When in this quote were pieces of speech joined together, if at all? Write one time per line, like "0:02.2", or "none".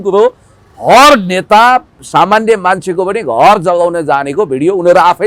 none